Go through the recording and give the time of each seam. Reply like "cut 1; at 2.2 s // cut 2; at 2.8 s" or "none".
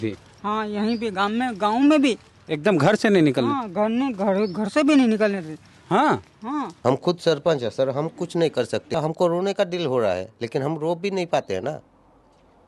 cut 1; at 6.7 s // cut 2; at 8.9 s